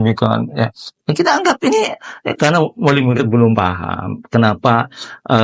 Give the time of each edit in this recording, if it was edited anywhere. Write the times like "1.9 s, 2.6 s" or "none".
none